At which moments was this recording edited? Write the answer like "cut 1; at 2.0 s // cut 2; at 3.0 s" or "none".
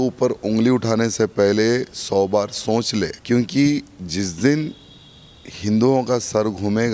cut 1; at 3.2 s